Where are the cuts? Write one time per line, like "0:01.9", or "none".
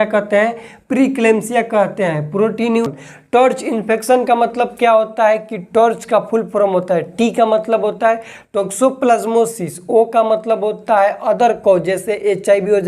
0:02.9